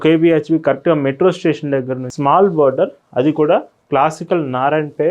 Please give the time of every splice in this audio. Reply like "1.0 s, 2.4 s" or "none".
2.0 s